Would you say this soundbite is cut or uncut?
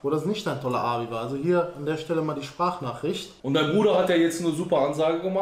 cut